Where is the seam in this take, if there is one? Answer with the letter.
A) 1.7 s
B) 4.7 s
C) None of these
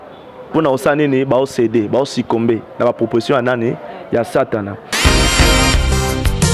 B